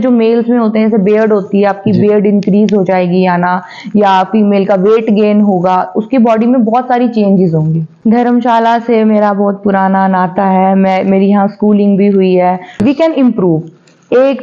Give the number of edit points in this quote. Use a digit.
2